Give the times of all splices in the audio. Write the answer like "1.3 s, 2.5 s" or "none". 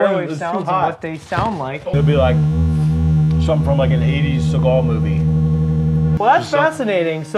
1.9 s, 6.2 s